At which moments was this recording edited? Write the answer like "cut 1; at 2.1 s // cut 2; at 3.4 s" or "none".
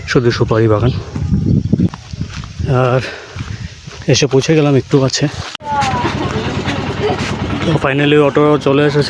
cut 1; at 1.9 s // cut 2; at 5.6 s